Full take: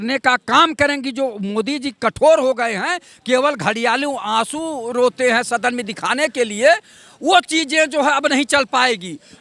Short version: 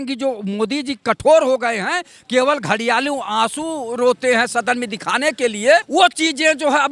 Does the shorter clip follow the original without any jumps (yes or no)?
no